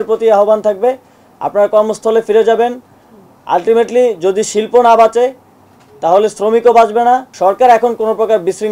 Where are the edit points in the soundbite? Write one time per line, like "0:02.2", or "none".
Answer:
0:07.3